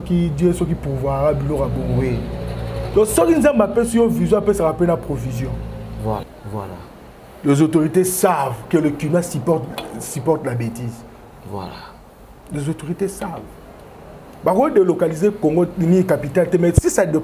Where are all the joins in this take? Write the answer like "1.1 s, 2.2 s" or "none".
6.3 s